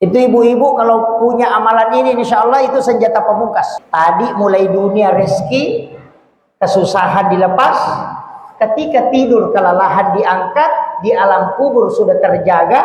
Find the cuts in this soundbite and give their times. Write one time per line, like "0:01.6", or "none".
0:03.8